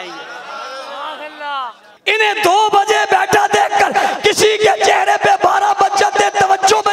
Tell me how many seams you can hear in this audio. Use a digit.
1